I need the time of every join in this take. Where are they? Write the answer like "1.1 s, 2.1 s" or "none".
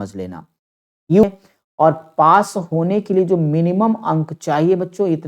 1.2 s